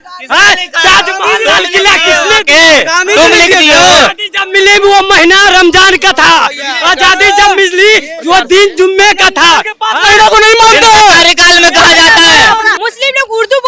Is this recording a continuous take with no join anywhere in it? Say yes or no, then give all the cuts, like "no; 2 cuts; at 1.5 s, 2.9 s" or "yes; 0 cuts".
yes; 0 cuts